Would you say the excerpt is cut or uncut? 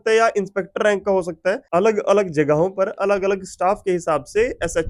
uncut